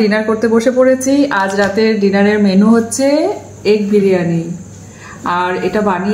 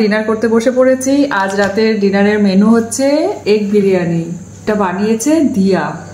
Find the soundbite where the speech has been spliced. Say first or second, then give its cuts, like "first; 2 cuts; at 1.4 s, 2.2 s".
second; 2 cuts; at 3.4 s, 4.6 s